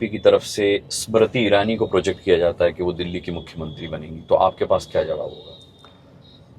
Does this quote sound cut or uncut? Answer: uncut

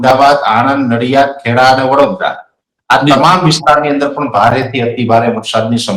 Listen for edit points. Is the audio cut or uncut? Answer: uncut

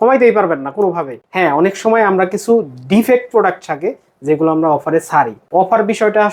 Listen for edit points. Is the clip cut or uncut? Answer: cut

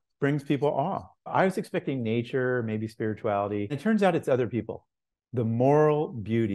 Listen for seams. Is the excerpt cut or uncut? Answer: cut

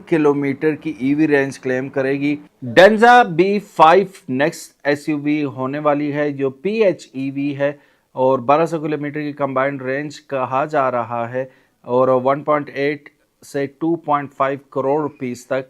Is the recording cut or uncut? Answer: cut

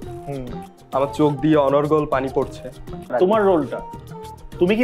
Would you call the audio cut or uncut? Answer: cut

